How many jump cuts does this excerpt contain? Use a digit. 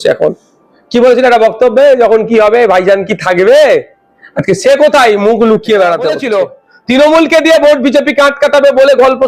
1